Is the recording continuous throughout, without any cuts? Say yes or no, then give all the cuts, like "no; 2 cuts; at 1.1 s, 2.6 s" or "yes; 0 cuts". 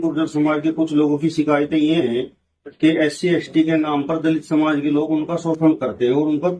yes; 0 cuts